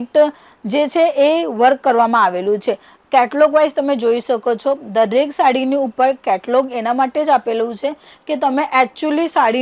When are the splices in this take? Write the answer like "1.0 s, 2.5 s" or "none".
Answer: none